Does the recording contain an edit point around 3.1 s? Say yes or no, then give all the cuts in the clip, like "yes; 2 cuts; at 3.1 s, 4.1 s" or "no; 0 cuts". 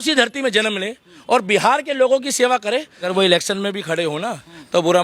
yes; 1 cut; at 3.1 s